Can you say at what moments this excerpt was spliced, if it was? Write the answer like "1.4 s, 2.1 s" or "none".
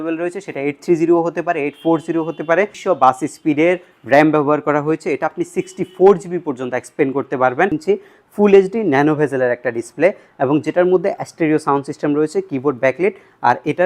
2.8 s, 7.7 s